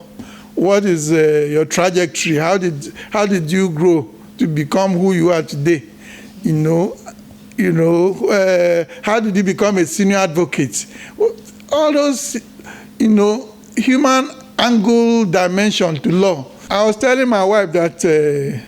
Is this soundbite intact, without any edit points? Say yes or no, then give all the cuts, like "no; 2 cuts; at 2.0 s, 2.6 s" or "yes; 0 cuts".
no; 1 cut; at 16.6 s